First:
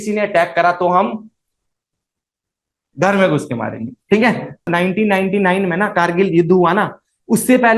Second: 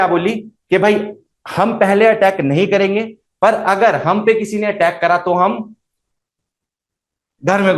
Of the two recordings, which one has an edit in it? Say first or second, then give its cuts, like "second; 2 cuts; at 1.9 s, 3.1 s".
first; 1 cut; at 4.7 s